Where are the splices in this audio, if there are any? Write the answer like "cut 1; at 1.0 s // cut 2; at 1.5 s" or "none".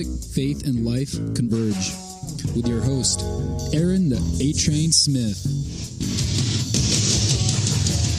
none